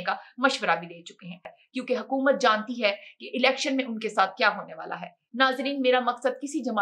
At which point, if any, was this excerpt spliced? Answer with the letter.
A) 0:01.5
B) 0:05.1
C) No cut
A